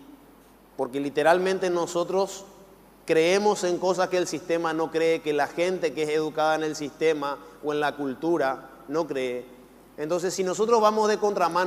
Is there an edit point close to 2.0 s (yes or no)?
no